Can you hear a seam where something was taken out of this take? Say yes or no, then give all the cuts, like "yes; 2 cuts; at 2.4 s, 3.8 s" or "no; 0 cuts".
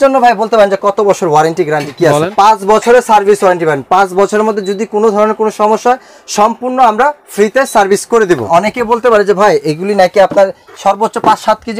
yes; 2 cuts; at 2.3 s, 8.5 s